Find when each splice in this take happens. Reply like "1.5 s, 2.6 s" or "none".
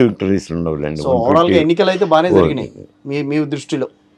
none